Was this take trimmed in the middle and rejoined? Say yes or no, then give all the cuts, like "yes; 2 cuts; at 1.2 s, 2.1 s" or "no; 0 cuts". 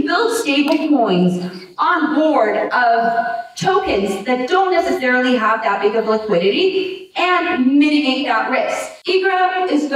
yes; 1 cut; at 8.9 s